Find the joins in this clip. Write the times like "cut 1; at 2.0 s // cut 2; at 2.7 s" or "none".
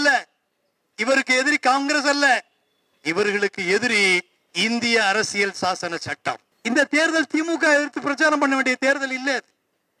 cut 1; at 6.5 s